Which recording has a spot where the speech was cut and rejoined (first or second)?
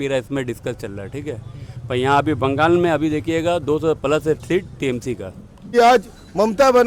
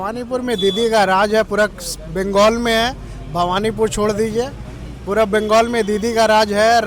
first